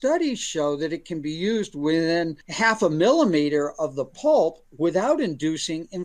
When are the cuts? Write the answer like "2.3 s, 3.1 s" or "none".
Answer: 2.4 s